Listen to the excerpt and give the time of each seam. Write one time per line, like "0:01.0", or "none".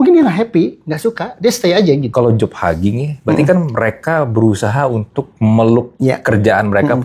0:02.1
0:05.2
0:05.9